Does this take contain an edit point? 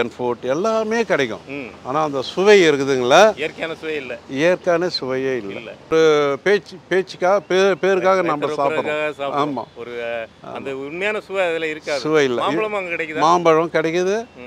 yes; 1 cut; at 5.9 s

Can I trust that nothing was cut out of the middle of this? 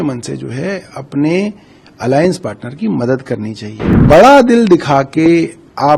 no; 1 cut; at 4.0 s

